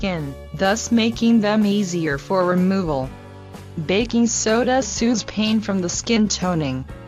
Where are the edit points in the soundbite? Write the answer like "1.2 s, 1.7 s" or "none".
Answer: none